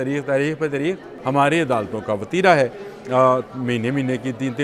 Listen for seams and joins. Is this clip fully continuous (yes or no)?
no